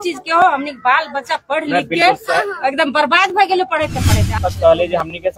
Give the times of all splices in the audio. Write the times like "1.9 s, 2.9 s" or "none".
4.4 s